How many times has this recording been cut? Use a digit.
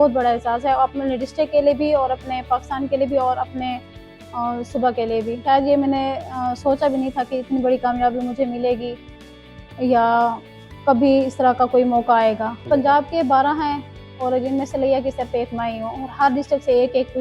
2